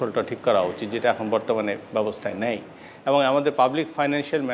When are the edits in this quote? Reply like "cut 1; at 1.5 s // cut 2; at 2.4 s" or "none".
none